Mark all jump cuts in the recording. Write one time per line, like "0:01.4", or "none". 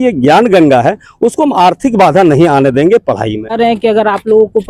0:03.5